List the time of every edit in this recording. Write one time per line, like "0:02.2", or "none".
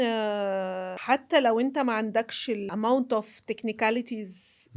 0:00.9
0:02.7